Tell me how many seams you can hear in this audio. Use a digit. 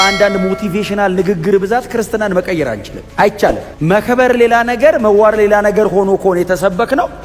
0